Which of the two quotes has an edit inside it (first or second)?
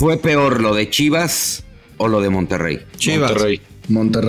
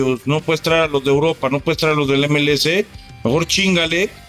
first